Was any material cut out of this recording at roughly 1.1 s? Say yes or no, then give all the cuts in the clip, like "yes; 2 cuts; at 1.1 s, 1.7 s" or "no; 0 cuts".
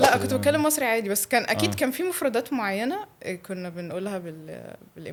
no; 0 cuts